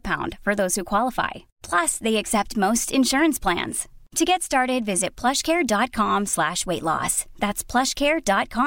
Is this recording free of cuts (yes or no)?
yes